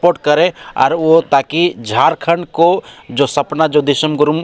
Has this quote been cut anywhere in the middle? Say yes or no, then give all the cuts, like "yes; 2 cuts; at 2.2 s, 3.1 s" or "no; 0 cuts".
no; 0 cuts